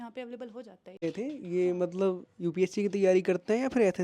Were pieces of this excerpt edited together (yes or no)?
yes